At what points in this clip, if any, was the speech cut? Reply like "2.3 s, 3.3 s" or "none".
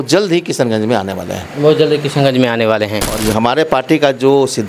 3.1 s